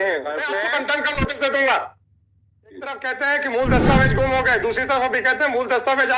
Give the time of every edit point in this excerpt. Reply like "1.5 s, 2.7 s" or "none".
0.9 s, 3.0 s